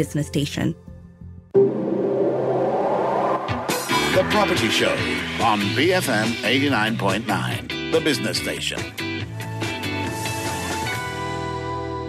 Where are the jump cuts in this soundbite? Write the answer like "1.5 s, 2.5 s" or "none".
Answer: 0.9 s